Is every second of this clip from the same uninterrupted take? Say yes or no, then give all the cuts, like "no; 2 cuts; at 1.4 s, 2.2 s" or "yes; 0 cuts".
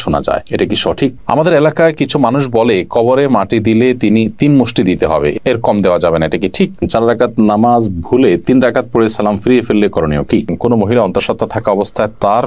no; 3 cuts; at 1.2 s, 6.8 s, 10.5 s